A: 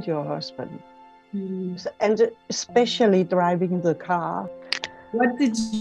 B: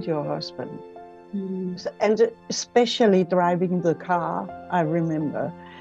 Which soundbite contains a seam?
A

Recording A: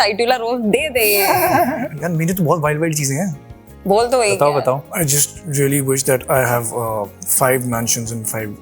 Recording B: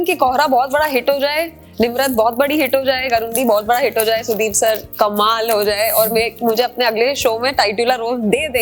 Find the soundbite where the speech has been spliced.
A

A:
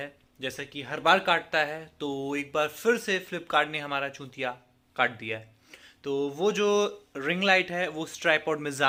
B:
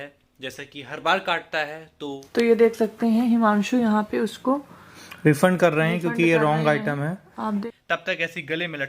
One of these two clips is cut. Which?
B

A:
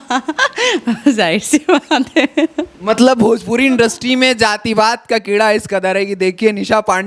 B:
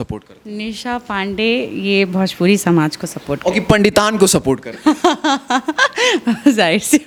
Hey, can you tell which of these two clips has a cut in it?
A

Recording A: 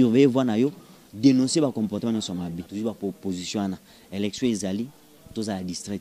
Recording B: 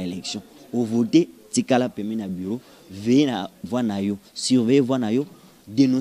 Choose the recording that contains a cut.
A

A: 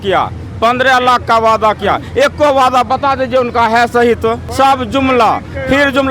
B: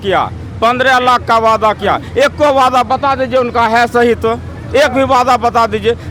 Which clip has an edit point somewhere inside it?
A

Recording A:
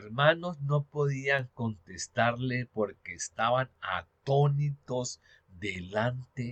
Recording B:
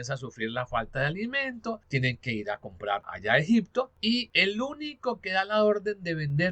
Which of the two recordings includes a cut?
B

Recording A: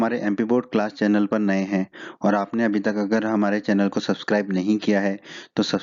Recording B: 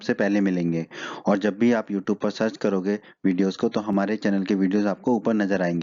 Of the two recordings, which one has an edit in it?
A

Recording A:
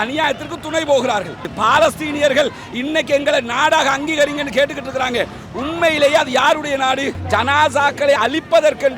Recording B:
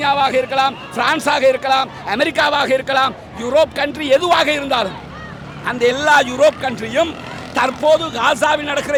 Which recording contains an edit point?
A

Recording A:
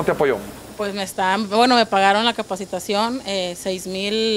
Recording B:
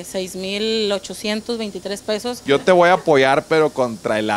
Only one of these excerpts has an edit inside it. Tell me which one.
B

